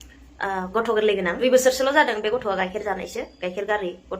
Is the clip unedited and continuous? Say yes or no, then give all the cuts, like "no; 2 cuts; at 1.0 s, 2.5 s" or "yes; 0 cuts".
no; 1 cut; at 1.4 s